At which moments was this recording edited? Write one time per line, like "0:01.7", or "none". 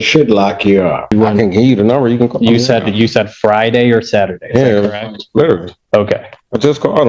0:01.1